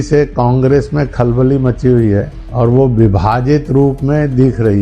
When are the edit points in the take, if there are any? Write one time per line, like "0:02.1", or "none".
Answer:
0:02.4